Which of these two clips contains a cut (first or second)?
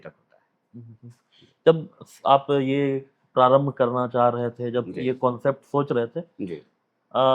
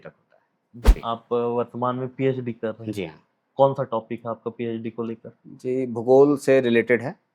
second